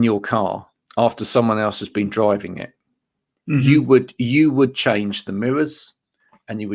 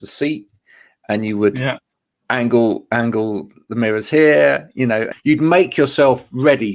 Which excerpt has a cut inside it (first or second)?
second